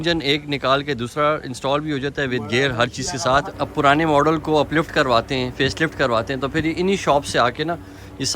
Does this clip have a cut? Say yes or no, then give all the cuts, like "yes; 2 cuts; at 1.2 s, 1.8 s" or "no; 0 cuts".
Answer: yes; 1 cut; at 3.5 s